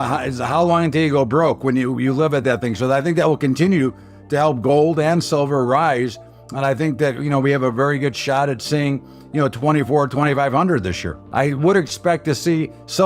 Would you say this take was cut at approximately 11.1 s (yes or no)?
yes